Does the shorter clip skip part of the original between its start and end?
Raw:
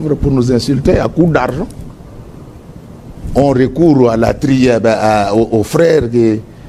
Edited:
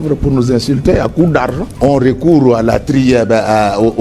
yes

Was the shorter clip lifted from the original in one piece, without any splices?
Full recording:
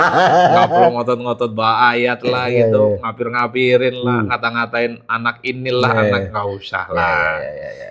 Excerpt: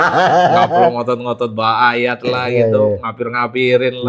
yes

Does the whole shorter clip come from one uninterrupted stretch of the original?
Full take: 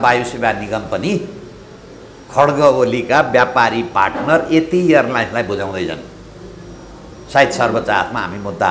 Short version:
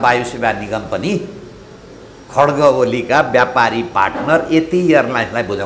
yes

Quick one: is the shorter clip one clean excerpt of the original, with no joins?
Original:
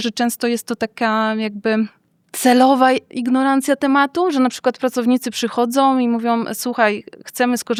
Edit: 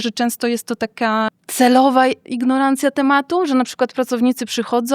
no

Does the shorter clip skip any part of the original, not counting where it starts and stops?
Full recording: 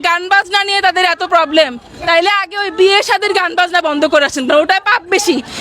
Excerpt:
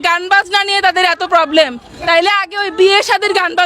no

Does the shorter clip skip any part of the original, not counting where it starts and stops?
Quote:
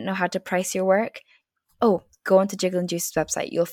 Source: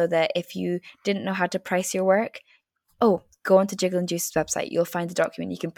no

